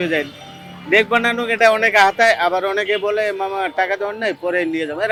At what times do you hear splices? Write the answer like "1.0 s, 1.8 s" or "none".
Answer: none